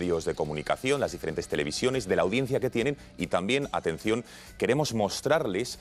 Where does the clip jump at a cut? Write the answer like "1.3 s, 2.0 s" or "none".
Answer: none